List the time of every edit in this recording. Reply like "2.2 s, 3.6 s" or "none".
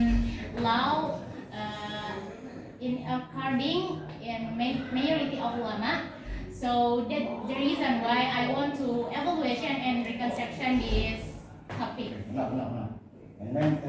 2.6 s